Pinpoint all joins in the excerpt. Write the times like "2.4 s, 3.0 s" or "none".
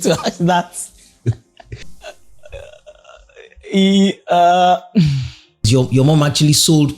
1.8 s, 5.7 s